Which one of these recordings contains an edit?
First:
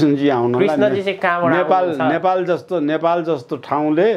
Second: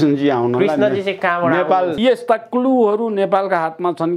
second; 1 cut; at 2.0 s

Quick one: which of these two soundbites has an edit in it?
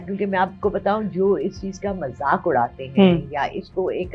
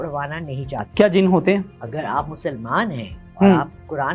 second; 2 cuts; at 0.8 s, 1.8 s

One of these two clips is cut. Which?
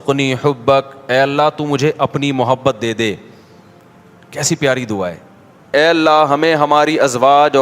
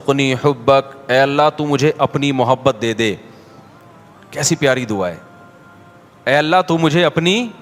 first; 1 cut; at 5.7 s

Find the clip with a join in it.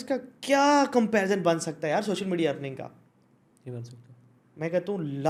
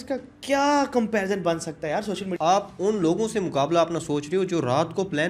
second; 1 cut; at 2.3 s

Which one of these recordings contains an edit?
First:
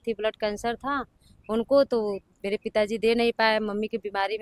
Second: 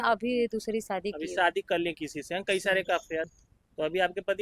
second; 1 cut; at 3.4 s

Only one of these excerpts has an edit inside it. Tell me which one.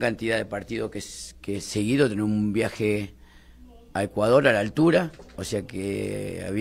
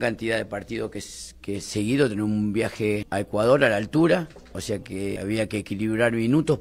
second; 2 cuts; at 3.1 s, 5.2 s

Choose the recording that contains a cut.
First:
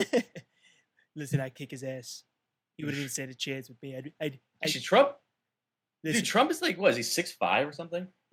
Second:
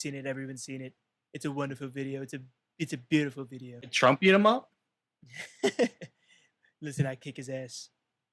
second; 1 cut; at 3.9 s

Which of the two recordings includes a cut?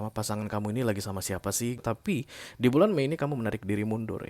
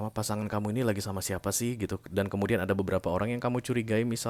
first; 1 cut; at 1.8 s

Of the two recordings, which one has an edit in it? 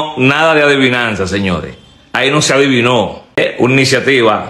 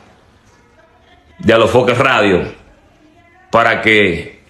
first; 1 cut; at 3.4 s

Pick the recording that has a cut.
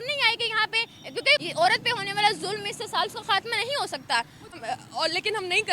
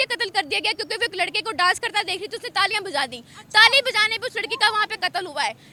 first; 2 cuts; at 1.5 s, 4.6 s

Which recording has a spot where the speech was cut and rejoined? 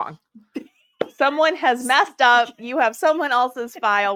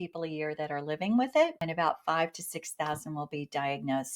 second; 1 cut; at 1.6 s

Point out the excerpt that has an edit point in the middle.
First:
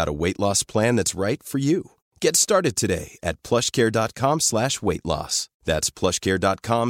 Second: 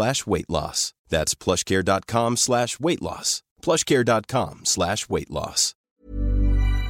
second; 1 cut; at 5.7 s

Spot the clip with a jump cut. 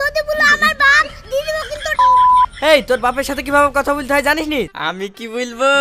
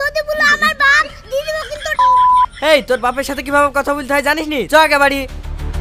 first; 1 cut; at 4.7 s

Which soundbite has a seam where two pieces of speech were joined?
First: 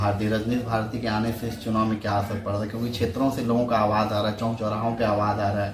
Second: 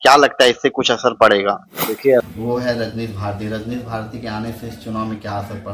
second; 1 cut; at 2.3 s

